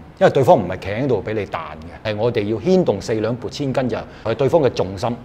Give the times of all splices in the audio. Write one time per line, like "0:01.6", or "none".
0:02.0
0:04.1